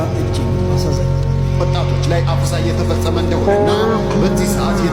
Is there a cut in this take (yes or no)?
no